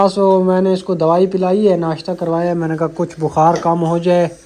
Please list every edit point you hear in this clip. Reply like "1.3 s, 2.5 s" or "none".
none